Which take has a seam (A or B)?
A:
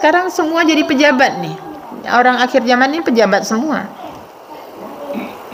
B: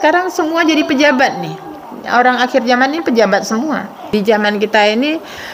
B